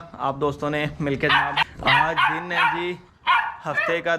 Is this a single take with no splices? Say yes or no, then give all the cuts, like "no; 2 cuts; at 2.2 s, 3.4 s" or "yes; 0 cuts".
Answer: no; 1 cut; at 1.6 s